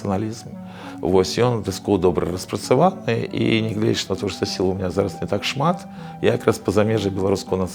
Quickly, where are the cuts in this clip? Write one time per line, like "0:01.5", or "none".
none